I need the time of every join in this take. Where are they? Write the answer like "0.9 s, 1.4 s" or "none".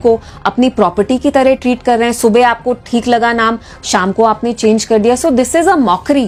none